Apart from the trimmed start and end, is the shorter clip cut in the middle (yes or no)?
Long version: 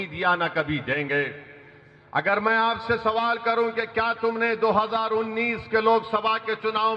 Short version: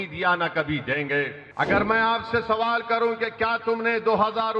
yes